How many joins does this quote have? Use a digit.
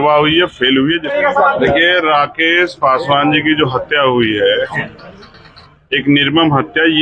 1